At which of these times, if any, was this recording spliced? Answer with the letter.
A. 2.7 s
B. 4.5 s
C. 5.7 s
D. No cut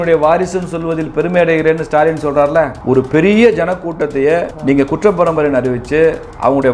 B